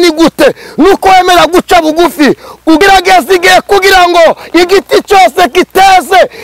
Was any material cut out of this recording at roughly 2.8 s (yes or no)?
yes